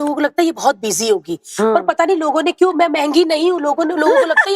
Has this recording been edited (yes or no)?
no